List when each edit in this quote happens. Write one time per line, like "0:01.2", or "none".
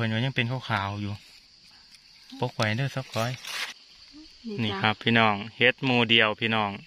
0:03.5